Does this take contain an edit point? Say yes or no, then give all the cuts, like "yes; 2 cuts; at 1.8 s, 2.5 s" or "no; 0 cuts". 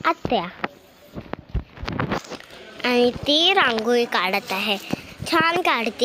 no; 0 cuts